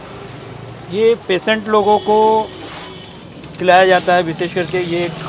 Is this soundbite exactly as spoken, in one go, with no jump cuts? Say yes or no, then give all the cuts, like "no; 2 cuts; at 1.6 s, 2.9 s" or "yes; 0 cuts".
yes; 0 cuts